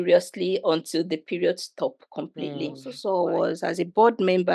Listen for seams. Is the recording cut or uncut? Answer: cut